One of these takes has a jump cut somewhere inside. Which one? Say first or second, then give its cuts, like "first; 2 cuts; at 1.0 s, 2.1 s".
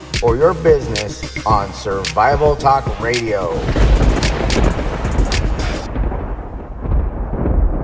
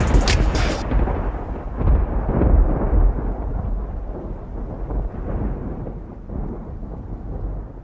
first; 1 cut; at 3.7 s